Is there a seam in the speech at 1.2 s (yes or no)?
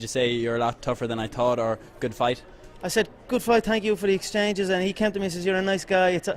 no